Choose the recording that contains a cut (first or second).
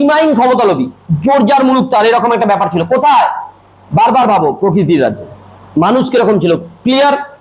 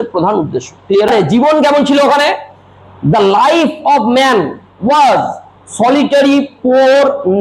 second